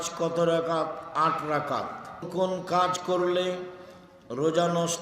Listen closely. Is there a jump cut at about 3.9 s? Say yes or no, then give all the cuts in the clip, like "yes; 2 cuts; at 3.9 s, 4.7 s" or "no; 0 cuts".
no; 1 cut; at 2.3 s